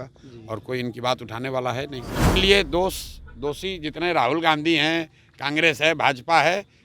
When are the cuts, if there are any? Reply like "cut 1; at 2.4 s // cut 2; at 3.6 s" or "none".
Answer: cut 1; at 2.4 s